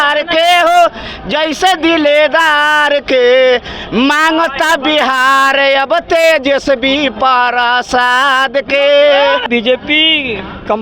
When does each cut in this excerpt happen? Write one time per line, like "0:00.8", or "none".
0:09.4